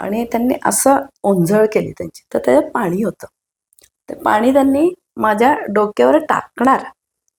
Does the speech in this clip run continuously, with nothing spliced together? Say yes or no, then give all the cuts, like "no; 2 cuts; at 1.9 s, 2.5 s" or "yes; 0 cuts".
yes; 0 cuts